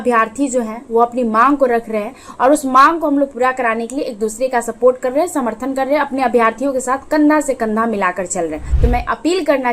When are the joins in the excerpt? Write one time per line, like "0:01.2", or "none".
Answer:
0:08.7